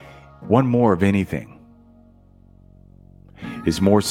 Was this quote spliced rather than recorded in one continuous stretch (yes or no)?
no